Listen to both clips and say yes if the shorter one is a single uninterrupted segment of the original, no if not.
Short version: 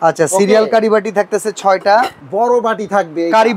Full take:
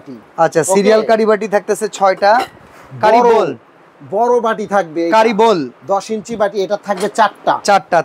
no